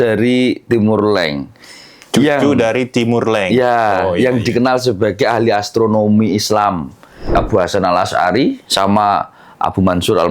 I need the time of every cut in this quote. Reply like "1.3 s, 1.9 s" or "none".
7.3 s